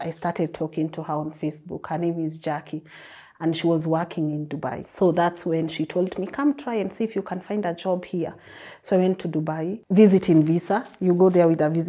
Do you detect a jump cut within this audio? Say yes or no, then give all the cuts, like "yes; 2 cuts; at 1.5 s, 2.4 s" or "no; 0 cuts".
no; 0 cuts